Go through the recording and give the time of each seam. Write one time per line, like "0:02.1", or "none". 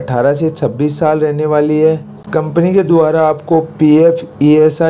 0:02.1